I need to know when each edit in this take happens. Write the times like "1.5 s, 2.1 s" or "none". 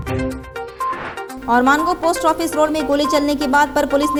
none